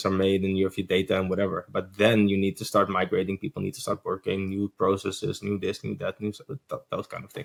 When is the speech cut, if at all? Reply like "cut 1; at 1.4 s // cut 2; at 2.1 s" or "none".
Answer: none